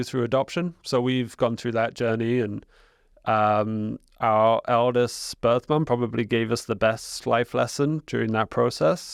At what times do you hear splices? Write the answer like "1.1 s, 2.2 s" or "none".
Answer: none